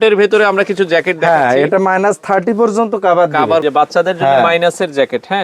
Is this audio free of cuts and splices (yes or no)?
no